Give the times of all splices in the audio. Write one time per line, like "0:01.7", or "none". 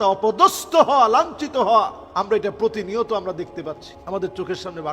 0:02.0
0:03.9

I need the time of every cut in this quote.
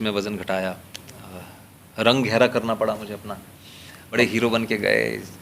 0:04.1

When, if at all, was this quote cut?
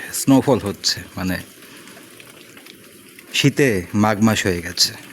none

